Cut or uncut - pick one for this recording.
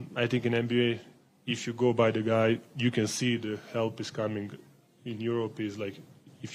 uncut